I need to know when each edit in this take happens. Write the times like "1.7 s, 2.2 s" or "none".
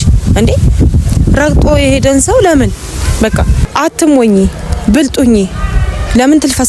3.6 s